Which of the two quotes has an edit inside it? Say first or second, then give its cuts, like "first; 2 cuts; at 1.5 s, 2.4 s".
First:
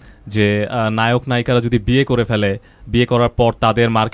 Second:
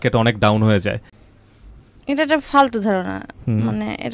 second; 1 cut; at 1.1 s